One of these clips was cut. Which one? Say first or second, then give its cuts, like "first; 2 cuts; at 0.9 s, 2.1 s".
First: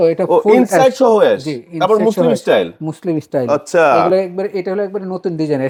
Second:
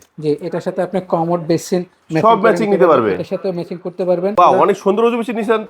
second; 1 cut; at 4.3 s